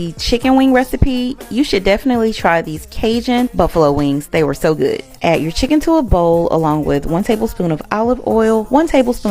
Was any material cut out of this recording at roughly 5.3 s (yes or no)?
no